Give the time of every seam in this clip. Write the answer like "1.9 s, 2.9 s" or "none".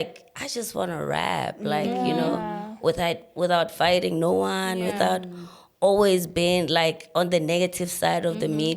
none